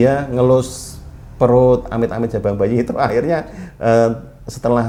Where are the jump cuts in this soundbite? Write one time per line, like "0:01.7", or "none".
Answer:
none